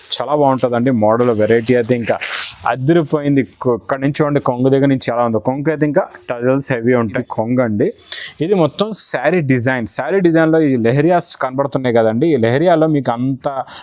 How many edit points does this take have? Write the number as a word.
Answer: one